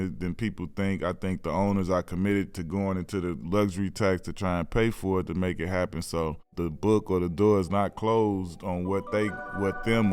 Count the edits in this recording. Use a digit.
1